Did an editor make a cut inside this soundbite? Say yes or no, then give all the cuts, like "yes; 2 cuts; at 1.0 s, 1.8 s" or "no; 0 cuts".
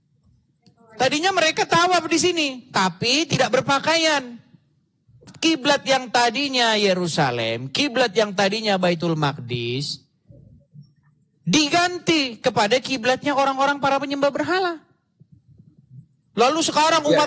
yes; 1 cut; at 5.3 s